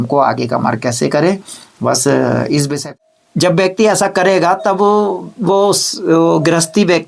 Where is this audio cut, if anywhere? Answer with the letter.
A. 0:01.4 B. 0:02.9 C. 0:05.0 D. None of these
B